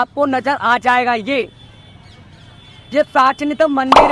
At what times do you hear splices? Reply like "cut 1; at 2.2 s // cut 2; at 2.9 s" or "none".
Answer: none

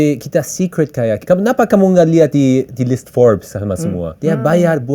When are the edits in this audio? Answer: cut 1; at 1.2 s // cut 2; at 4.1 s

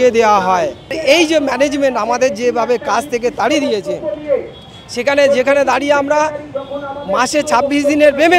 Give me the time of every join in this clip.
cut 1; at 1.0 s

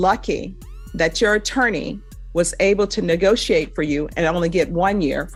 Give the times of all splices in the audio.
none

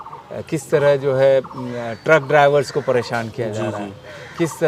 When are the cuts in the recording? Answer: none

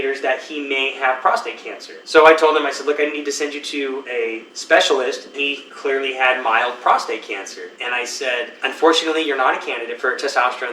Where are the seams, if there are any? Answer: cut 1; at 5.4 s // cut 2; at 7.7 s // cut 3; at 8.5 s

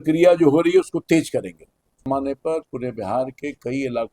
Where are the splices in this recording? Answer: cut 1; at 1.9 s

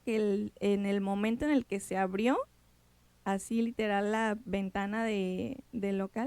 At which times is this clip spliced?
none

